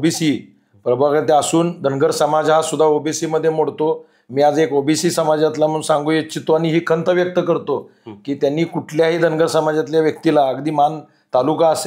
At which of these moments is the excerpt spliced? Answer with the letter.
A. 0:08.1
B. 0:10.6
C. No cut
C